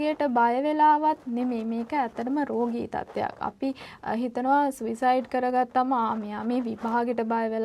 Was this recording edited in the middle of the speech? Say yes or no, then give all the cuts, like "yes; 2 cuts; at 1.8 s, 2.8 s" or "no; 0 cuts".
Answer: no; 0 cuts